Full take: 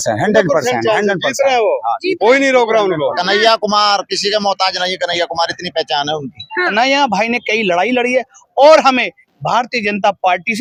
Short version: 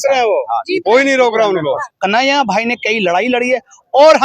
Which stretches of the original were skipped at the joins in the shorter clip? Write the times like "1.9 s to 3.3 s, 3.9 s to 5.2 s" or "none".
3.2 s to 6.5 s